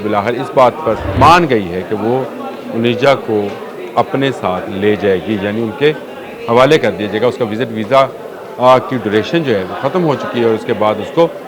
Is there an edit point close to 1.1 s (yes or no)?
yes